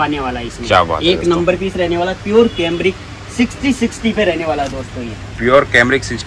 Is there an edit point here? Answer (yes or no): no